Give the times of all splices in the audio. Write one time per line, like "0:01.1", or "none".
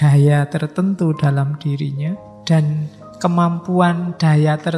0:02.3